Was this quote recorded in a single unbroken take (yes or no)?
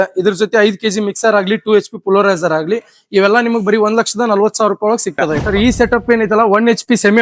no